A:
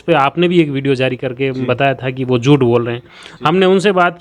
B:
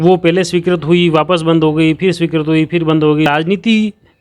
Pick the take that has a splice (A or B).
B